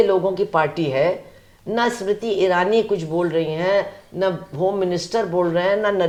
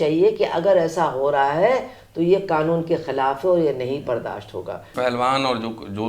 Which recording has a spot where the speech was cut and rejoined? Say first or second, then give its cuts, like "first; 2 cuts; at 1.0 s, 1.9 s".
second; 1 cut; at 4.9 s